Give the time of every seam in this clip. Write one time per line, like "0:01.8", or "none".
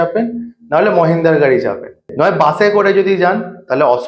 0:02.1